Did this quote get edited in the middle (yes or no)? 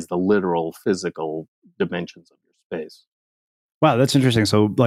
no